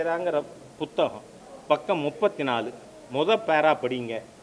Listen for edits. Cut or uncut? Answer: uncut